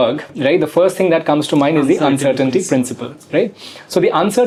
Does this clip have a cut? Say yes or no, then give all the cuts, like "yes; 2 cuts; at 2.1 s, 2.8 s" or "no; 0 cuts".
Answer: no; 0 cuts